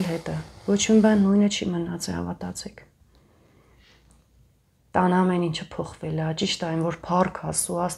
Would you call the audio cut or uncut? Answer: uncut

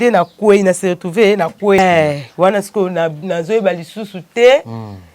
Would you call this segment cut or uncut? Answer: cut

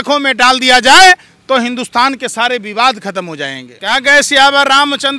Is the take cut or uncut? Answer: cut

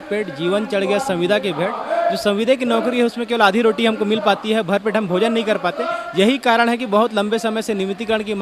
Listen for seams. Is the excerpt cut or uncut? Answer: uncut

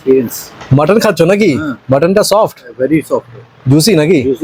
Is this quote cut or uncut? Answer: uncut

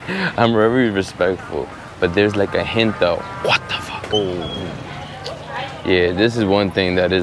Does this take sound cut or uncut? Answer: cut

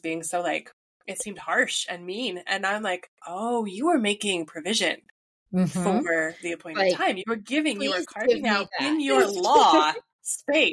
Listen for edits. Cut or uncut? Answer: uncut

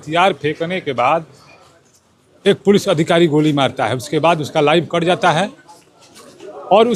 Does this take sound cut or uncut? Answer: uncut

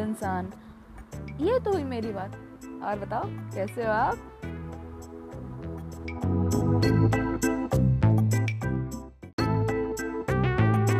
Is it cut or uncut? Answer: cut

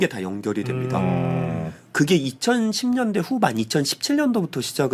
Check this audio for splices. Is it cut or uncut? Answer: uncut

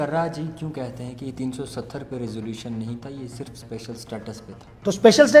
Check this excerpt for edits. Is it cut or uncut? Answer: uncut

